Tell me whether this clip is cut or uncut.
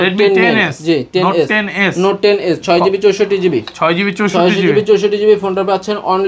uncut